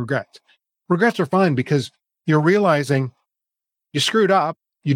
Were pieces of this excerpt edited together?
no; 0 cuts

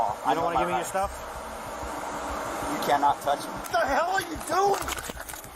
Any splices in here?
yes; 1 cut; at 3.7 s

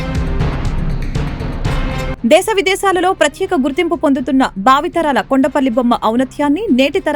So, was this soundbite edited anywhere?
no; 0 cuts

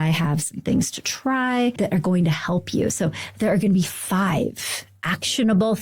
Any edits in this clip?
yes; 1 cut; at 1.8 s

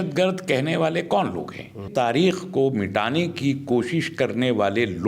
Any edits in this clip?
yes; 1 cut; at 1.9 s

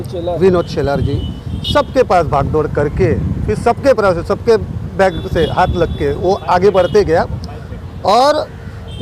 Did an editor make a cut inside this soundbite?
no; 0 cuts

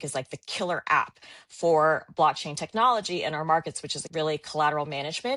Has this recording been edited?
yes; 1 cut; at 4.0 s

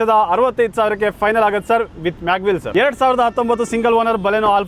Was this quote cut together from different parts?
yes; 1 cut; at 2.7 s

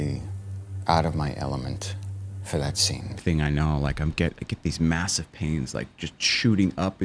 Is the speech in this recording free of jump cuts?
no; 1 cut; at 3.1 s

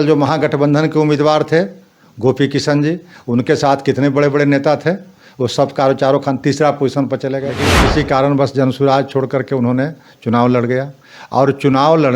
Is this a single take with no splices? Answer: no; 1 cut; at 7.8 s

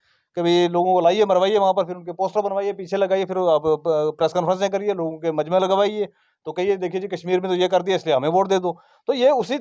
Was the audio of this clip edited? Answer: no; 0 cuts

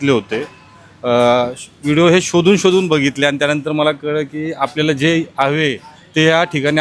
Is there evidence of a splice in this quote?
no; 0 cuts

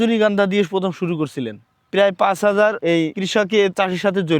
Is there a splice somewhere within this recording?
yes; 1 cut; at 1.9 s

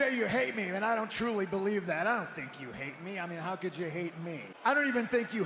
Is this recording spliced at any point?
yes; 1 cut; at 4.5 s

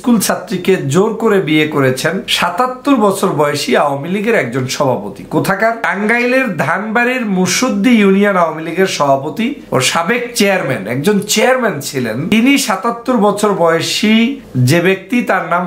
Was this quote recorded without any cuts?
no; 5 cuts; at 2.3 s, 5.9 s, 9.6 s, 12.3 s, 14.5 s

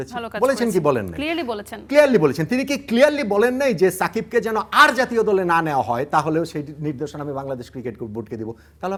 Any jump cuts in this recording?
no; 0 cuts

